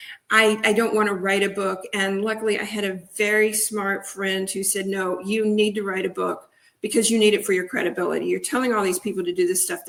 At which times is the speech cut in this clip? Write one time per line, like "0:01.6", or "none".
none